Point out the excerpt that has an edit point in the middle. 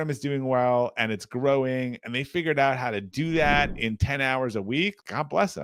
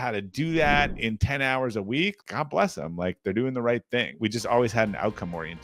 second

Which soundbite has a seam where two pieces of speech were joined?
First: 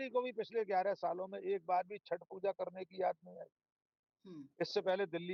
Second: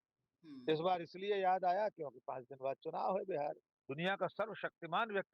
second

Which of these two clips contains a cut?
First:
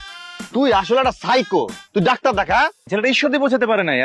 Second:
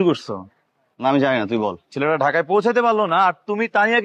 first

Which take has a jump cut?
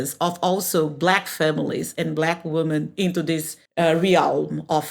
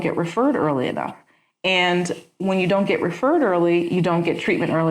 first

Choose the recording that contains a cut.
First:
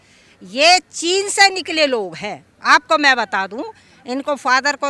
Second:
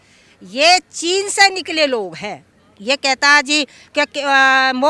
second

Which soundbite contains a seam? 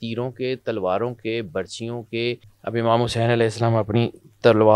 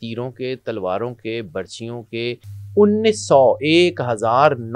first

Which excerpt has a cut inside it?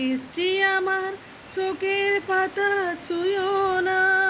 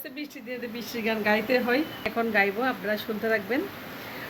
second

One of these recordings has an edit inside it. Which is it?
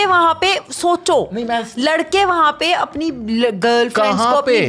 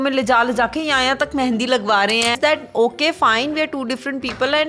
second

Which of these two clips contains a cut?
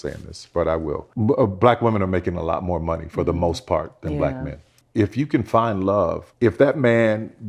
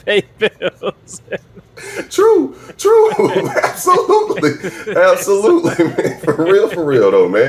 first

